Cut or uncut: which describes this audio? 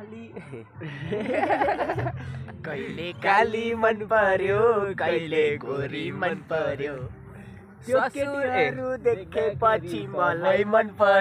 uncut